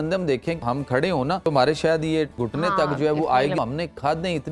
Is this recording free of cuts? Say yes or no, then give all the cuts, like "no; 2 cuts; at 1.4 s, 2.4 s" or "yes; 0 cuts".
no; 3 cuts; at 1.1 s, 2.4 s, 3.6 s